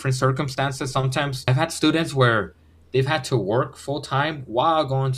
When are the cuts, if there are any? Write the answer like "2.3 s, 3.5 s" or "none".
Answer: 1.5 s